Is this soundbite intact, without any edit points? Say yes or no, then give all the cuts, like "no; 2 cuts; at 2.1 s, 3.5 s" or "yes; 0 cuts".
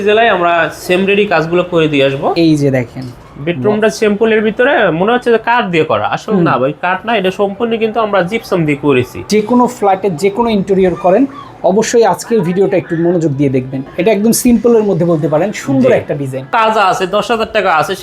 no; 4 cuts; at 2.3 s, 9.2 s, 13.8 s, 16.5 s